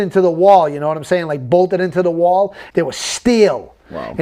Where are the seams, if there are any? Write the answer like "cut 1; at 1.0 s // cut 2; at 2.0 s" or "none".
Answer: cut 1; at 2.6 s